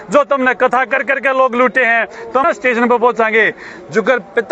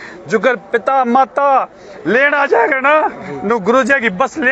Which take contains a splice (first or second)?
first